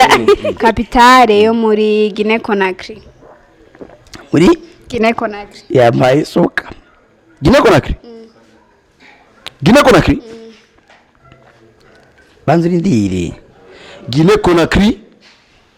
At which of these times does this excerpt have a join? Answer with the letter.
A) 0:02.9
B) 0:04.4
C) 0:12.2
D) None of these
D